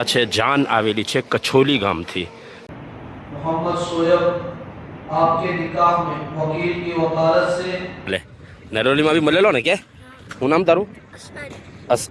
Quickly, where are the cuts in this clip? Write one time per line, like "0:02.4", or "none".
0:02.5
0:08.3